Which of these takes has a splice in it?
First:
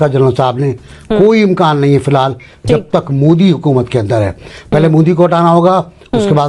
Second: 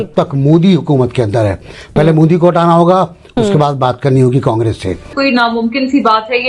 second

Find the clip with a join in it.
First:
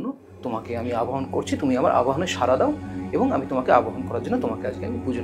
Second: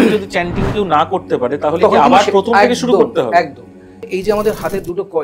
second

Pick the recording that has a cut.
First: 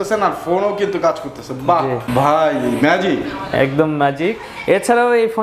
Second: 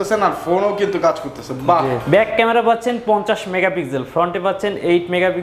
second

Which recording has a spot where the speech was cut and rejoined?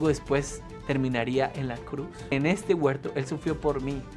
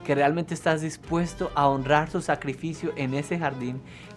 first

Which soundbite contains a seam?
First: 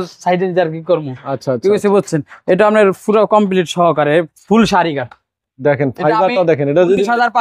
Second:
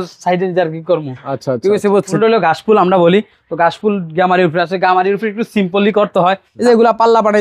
second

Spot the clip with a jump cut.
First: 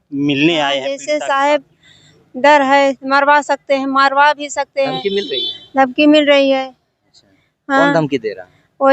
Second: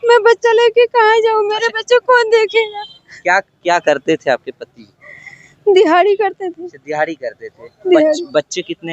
first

